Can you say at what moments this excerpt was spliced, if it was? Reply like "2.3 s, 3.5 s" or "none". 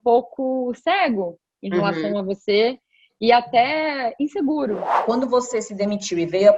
5.0 s